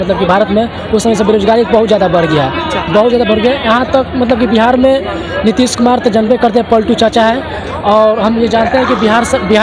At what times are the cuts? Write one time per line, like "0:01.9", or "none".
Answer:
none

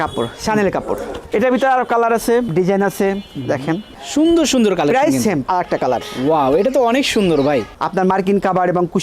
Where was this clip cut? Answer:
0:01.2
0:05.4
0:07.8

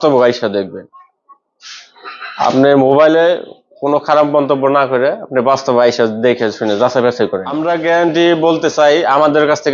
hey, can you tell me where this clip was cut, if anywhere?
0:07.5

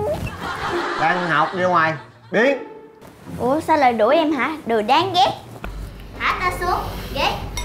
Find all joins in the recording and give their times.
0:05.5

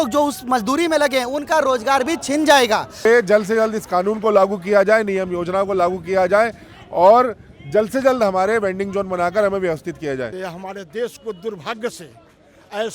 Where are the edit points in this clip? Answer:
0:03.1
0:10.4

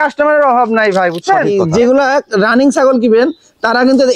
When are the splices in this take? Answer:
0:01.5

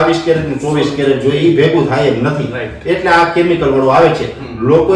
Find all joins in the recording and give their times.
none

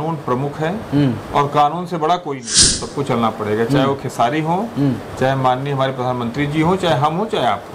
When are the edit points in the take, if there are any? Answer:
0:02.8

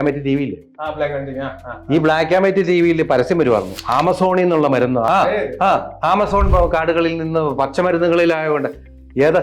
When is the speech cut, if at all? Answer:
0:05.1

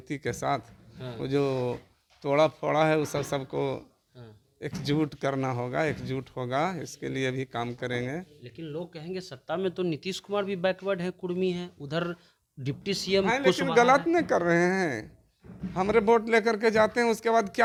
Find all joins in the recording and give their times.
none

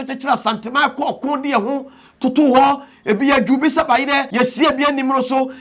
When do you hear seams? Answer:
0:04.3

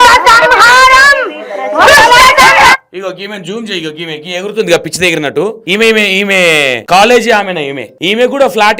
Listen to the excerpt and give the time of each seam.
0:05.6
0:06.8
0:07.9

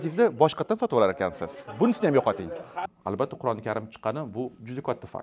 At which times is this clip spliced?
0:02.9

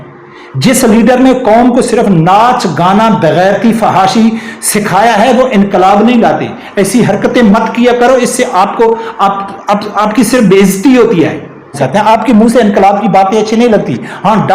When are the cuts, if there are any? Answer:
0:11.8

